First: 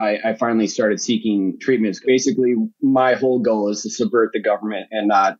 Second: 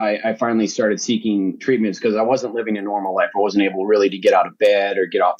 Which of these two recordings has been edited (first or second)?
first